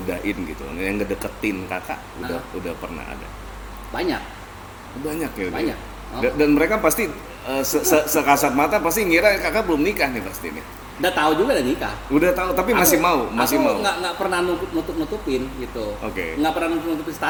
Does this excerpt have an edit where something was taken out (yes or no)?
no